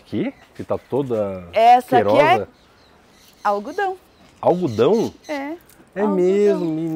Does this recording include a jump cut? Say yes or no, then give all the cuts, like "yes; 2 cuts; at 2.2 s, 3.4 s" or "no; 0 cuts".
no; 0 cuts